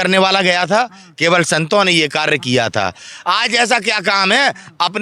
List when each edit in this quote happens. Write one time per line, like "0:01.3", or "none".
none